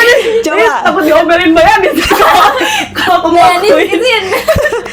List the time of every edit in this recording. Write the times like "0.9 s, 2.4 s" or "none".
none